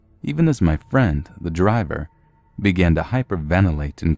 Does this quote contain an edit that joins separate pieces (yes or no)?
yes